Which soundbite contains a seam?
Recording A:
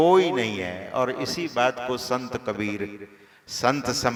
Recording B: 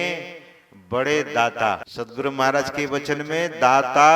B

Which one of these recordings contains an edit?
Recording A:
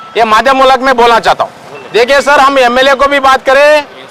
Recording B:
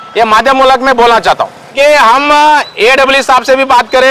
B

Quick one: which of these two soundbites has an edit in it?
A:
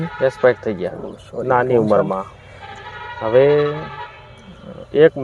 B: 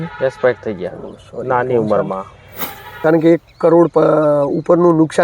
B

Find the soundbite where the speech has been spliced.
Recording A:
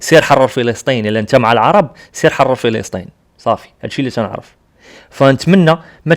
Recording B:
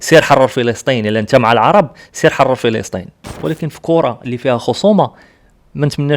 B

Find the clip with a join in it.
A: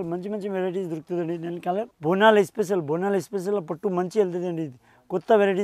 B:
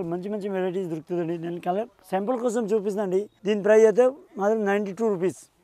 A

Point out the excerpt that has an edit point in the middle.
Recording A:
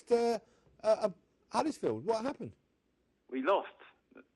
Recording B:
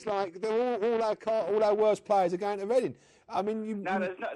A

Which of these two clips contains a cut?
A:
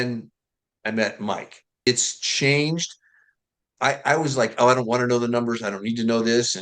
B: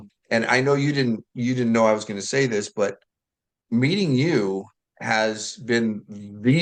A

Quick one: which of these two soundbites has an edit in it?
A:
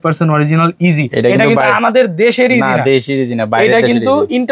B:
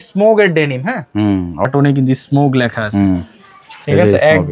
B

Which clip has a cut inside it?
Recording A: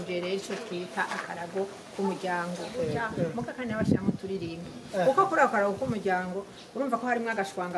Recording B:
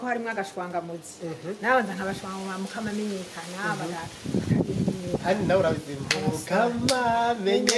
A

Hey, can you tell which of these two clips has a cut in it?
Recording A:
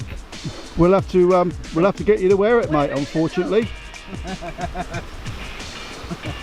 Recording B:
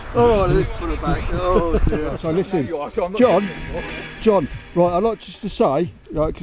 B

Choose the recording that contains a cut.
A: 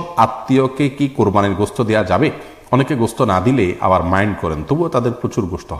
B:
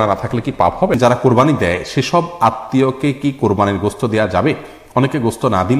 B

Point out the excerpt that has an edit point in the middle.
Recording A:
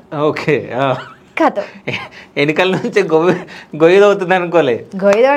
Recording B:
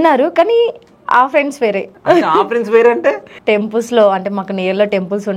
B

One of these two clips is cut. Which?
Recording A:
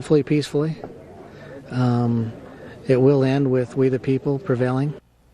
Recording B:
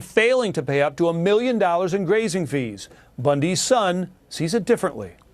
A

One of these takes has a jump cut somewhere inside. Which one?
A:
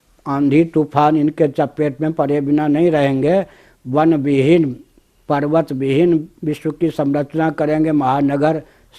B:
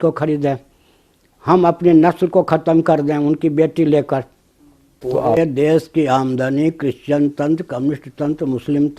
B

